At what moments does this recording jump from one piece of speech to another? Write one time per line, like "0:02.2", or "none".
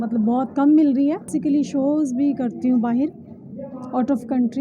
0:01.3